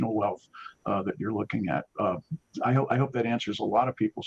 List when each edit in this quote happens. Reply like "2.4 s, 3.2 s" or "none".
none